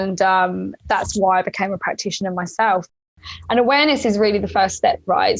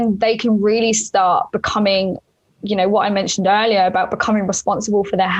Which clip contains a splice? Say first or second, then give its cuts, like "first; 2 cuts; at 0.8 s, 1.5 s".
first; 1 cut; at 3.0 s